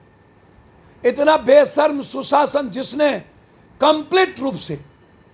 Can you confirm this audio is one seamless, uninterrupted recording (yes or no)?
yes